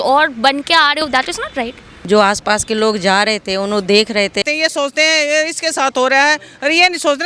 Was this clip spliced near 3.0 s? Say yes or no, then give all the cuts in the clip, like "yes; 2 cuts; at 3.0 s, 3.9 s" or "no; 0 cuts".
no; 2 cuts; at 1.6 s, 4.4 s